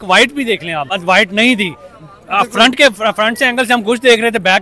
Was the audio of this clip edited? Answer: yes; 1 cut; at 0.9 s

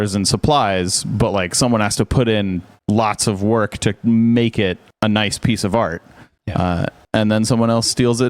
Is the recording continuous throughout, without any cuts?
yes; 0 cuts

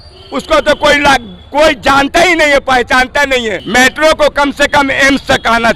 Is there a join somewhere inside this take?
yes; 1 cut; at 3.6 s

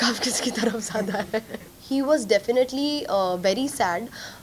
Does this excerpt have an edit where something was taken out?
yes; 1 cut; at 1.7 s

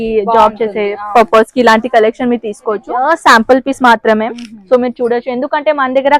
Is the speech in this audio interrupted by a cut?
yes; 1 cut; at 2.9 s

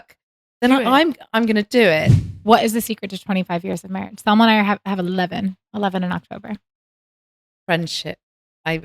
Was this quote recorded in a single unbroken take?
no; 1 cut; at 2.1 s

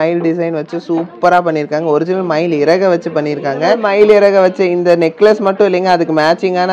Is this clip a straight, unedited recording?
no; 1 cut; at 3.8 s

